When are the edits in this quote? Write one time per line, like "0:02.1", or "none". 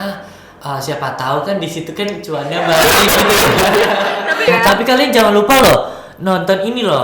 0:04.4